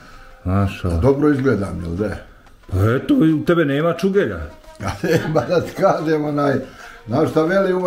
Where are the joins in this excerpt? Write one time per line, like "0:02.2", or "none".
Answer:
none